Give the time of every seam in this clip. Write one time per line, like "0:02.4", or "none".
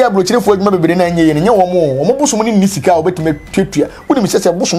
none